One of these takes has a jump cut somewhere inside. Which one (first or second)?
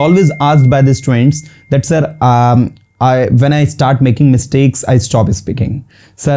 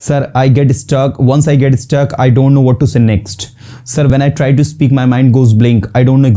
second